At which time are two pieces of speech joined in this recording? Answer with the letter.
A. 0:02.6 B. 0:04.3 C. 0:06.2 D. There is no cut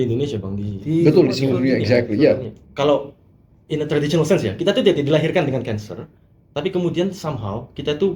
A